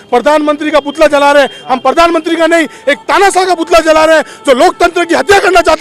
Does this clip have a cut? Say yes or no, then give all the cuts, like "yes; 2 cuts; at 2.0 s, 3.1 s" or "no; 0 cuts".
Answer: no; 0 cuts